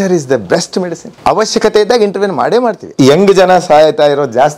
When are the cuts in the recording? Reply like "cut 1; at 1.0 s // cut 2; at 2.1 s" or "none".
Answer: cut 1; at 1.0 s // cut 2; at 2.8 s